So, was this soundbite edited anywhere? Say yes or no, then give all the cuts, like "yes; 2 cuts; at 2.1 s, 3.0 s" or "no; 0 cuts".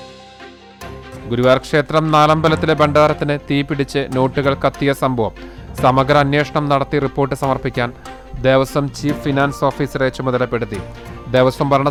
no; 0 cuts